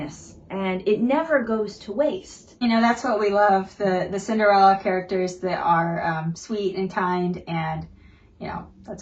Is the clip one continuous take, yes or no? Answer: no